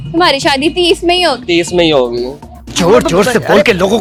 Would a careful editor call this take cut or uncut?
uncut